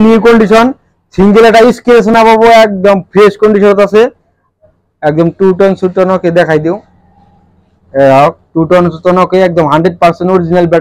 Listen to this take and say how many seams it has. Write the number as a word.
zero